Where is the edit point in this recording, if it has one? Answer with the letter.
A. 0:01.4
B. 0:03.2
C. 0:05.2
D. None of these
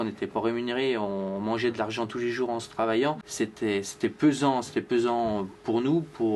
B